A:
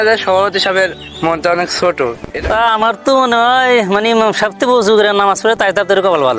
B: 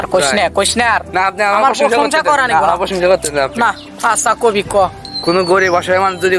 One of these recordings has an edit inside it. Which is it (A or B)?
A